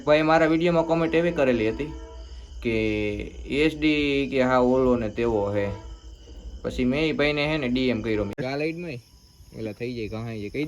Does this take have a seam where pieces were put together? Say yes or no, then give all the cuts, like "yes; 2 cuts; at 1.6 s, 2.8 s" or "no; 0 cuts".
yes; 1 cut; at 8.4 s